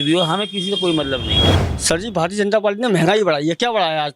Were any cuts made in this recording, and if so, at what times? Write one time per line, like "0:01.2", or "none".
0:01.5